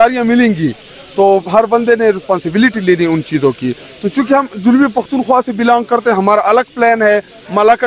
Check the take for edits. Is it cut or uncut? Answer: uncut